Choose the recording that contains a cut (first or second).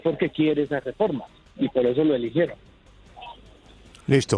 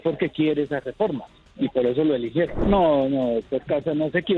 second